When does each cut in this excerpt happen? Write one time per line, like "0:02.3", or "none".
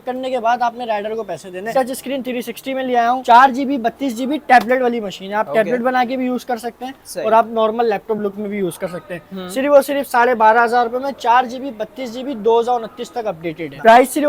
none